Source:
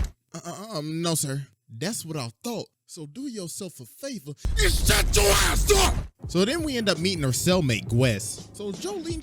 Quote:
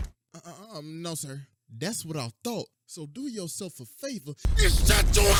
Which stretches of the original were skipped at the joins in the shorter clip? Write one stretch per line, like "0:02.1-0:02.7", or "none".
none